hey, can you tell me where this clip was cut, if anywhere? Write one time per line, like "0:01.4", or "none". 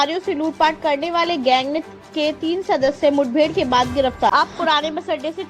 0:04.3